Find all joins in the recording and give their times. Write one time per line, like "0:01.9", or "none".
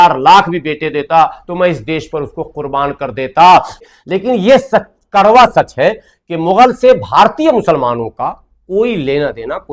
0:03.8